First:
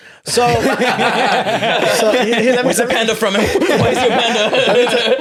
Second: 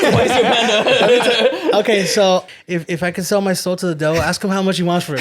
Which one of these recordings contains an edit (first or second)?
second